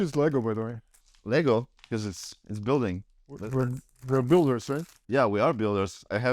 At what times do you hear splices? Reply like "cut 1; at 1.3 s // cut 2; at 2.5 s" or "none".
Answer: cut 1; at 3.4 s